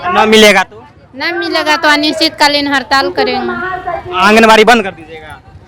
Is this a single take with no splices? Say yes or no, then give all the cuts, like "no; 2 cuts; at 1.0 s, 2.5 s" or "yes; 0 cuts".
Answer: yes; 0 cuts